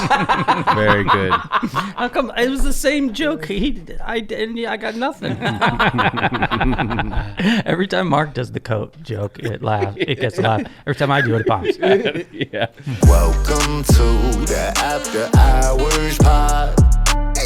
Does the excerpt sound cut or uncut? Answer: cut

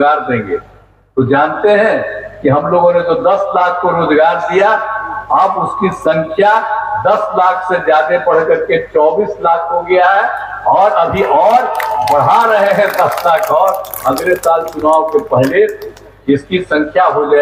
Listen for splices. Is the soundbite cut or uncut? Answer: uncut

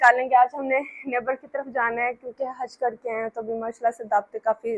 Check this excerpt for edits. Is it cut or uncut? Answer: uncut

